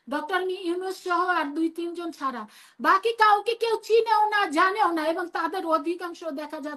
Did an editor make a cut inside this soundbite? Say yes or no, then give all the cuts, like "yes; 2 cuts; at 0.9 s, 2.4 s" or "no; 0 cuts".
no; 0 cuts